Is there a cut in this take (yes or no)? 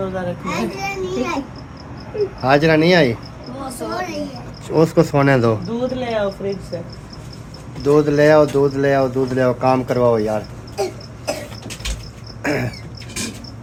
no